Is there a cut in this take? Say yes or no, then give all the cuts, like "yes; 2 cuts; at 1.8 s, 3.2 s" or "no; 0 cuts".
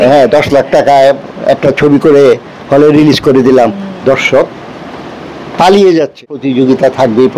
yes; 1 cut; at 6.4 s